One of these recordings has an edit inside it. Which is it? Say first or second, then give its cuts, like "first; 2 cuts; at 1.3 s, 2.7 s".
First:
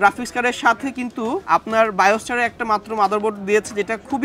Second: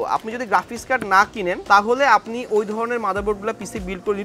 second; 1 cut; at 1.6 s